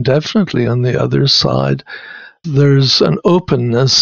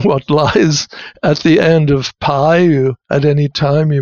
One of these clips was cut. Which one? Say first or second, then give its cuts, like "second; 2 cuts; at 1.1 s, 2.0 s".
first; 1 cut; at 2.4 s